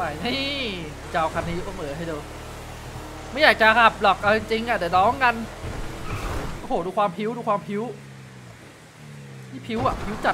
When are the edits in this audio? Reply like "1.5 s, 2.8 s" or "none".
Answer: 1.0 s, 5.5 s